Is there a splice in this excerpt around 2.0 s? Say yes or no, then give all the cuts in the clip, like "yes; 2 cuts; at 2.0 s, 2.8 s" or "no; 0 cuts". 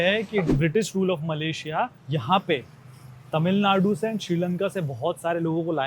yes; 1 cut; at 2.0 s